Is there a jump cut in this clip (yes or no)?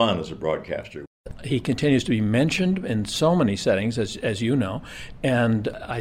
yes